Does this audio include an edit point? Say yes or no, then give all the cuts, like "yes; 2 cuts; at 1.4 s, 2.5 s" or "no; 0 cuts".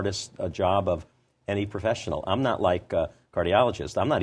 no; 0 cuts